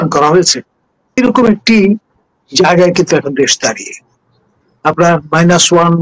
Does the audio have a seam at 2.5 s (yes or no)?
no